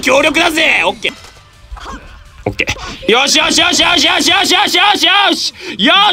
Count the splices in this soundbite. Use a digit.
1